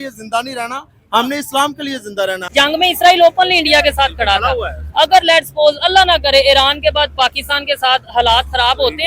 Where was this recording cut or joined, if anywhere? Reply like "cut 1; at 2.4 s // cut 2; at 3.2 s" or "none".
cut 1; at 2.4 s